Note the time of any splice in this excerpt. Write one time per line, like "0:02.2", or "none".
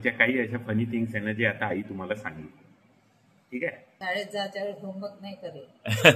0:03.9